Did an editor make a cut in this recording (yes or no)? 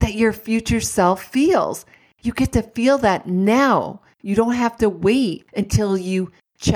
yes